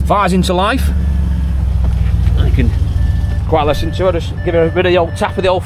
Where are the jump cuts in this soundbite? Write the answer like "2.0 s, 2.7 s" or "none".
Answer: none